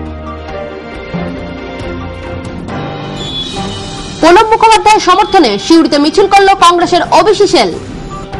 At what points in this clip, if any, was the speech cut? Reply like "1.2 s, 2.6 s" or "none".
3.1 s